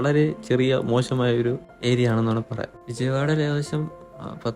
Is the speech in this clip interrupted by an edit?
no; 0 cuts

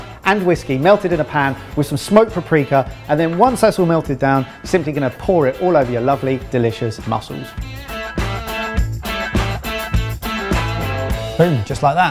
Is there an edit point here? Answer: no; 0 cuts

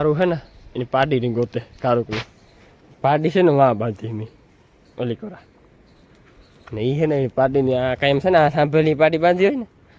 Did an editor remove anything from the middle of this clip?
no; 0 cuts

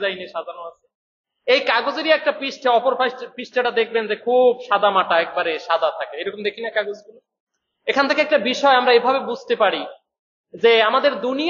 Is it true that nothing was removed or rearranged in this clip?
yes; 0 cuts

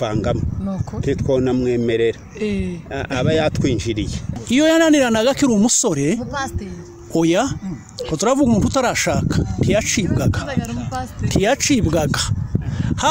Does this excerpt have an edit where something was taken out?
yes; 1 cut; at 4.3 s

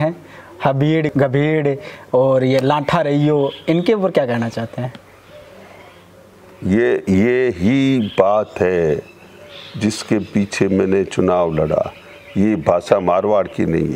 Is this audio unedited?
no; 1 cut; at 1.1 s

